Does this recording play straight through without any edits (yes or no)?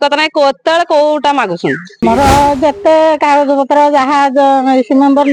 no